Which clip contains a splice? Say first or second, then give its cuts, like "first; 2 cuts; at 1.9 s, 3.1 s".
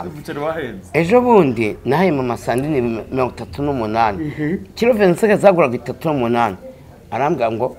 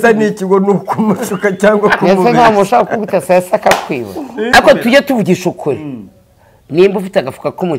second; 1 cut; at 4.5 s